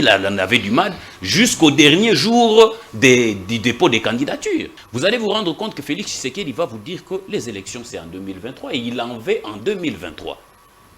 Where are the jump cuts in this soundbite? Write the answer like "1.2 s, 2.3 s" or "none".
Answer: 4.8 s